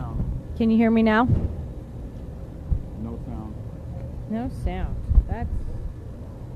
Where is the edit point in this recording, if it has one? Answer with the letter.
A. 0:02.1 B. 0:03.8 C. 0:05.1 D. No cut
B